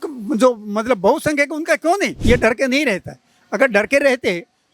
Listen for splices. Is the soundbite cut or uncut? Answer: cut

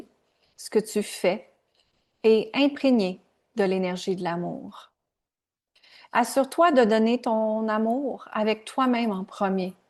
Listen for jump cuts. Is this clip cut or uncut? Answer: uncut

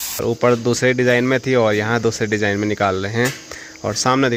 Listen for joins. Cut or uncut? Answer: uncut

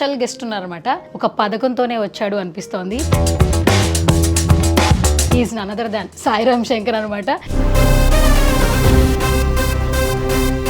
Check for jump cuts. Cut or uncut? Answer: cut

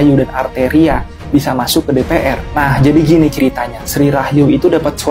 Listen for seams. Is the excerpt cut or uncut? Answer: uncut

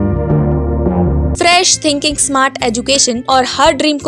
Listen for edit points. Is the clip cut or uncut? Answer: cut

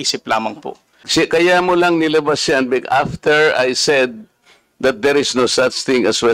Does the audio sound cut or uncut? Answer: cut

